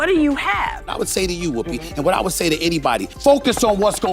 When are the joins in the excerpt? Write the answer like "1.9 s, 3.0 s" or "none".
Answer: 0.9 s, 3.1 s